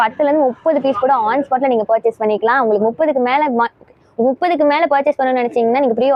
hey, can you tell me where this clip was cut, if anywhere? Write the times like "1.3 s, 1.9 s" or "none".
none